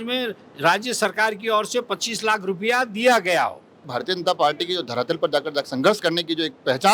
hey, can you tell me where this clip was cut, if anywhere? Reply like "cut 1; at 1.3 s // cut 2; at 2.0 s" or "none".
cut 1; at 3.9 s